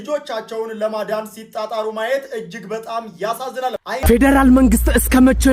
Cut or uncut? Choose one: cut